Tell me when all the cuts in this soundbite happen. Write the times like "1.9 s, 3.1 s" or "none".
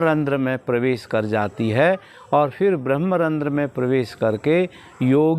none